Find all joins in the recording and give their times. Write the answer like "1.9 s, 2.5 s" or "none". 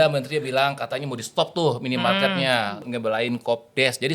2.9 s